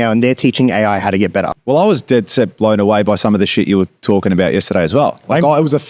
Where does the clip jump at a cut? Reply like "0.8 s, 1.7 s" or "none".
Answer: 1.5 s

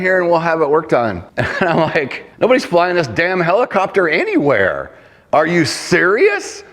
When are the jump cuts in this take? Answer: 1.3 s, 2.2 s

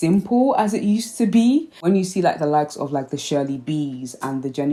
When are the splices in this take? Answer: none

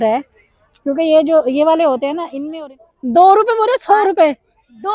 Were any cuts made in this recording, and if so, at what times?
2.3 s

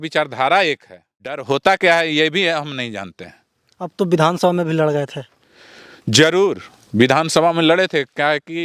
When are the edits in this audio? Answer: 1.4 s

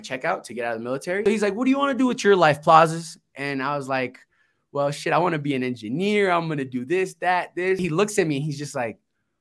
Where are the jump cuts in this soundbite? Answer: 1.2 s, 7.8 s

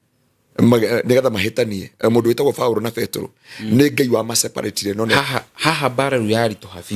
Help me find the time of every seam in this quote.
5.2 s

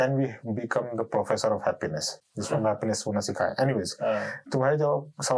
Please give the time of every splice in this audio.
none

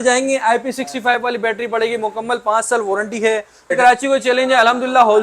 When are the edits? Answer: 3.7 s

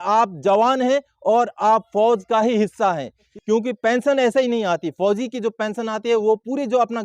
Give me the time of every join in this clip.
3.3 s

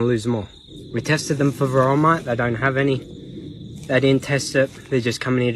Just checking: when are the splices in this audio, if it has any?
none

